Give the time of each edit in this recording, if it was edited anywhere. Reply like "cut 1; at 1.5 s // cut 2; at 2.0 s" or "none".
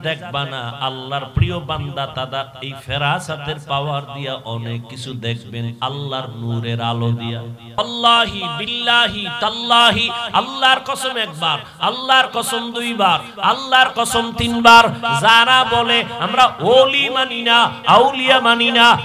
cut 1; at 7.8 s